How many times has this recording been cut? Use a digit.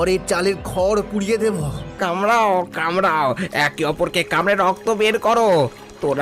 1